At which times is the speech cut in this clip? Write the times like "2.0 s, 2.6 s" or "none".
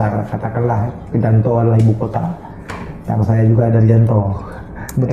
none